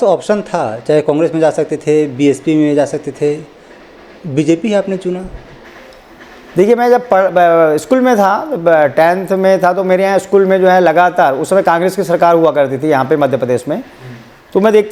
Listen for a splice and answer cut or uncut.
uncut